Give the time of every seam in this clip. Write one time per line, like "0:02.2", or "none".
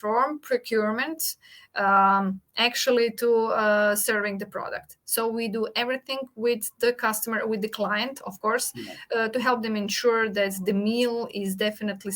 none